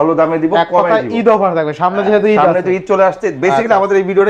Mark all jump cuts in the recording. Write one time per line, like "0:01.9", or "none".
none